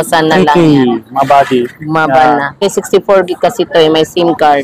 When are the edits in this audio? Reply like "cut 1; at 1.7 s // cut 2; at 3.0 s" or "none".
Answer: cut 1; at 2.7 s